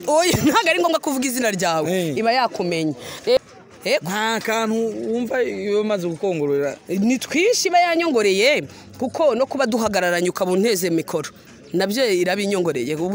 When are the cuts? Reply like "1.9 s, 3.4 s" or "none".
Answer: 3.4 s